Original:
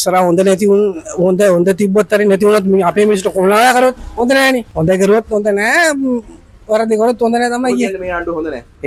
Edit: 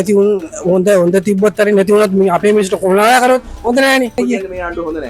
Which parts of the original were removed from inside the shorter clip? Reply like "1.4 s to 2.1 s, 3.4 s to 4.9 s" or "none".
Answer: 4.7 s to 7.7 s